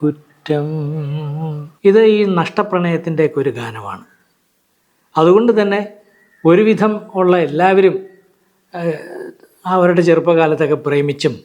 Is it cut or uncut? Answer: cut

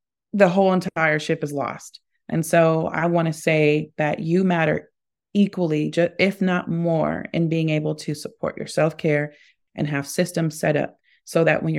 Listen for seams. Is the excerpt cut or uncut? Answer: uncut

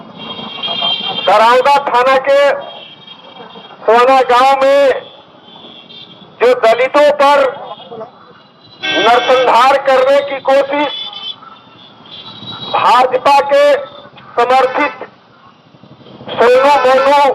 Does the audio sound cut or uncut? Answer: uncut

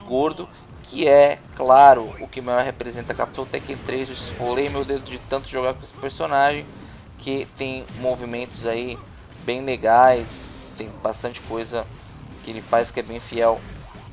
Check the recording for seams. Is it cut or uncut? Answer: uncut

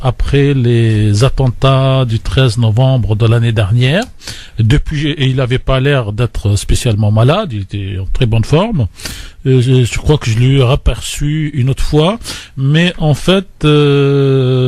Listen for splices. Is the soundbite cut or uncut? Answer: cut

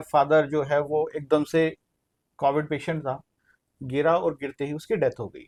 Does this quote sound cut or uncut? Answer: uncut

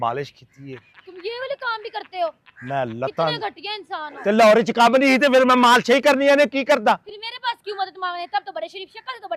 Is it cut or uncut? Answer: uncut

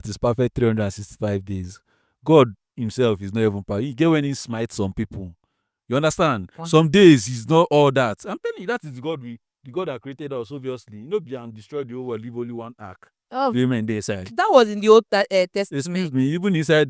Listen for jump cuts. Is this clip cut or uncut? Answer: uncut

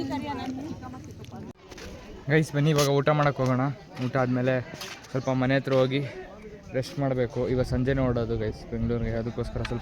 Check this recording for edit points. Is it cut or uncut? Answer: cut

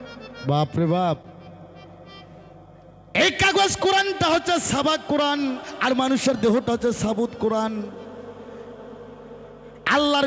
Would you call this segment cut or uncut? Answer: uncut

